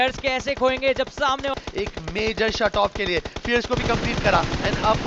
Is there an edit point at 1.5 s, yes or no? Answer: yes